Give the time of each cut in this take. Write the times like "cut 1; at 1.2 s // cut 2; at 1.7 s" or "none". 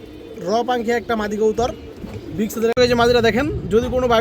cut 1; at 2.8 s